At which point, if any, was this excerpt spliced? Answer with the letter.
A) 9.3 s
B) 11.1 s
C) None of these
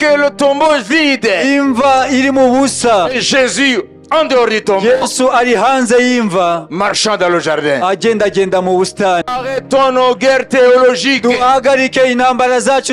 A